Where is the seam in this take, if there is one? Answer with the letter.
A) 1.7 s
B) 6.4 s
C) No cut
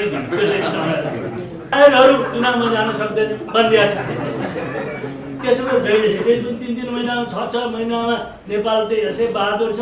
A